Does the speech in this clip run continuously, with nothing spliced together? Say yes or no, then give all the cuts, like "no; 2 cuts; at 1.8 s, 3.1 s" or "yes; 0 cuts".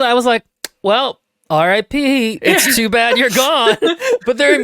no; 1 cut; at 2.4 s